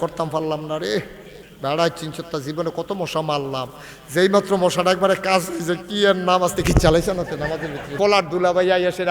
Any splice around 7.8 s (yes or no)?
yes